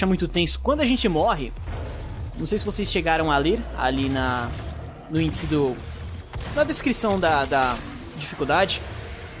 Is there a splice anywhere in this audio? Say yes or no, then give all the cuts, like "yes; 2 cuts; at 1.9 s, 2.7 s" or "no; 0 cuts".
no; 0 cuts